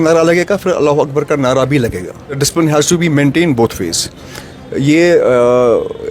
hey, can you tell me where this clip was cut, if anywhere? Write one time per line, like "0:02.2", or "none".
0:02.4